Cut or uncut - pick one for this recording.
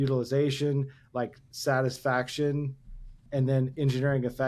cut